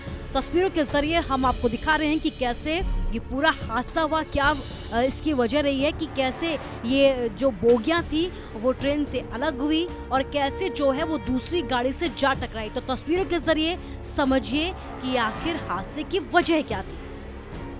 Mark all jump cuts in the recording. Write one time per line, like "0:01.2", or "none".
0:16.9